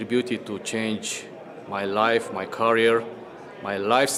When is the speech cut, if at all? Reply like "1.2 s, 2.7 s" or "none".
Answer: none